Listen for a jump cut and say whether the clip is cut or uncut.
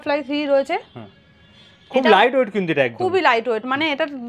uncut